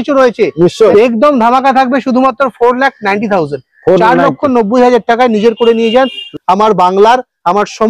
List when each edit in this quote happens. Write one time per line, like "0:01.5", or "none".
0:00.9
0:06.2